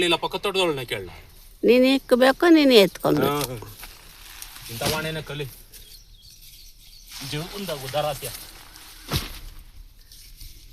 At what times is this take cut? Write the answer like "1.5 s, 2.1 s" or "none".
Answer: none